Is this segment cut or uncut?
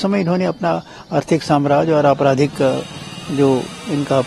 uncut